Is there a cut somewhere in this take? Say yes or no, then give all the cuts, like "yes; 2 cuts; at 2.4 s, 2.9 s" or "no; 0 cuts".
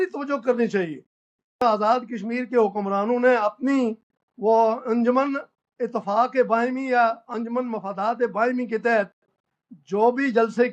yes; 1 cut; at 1.6 s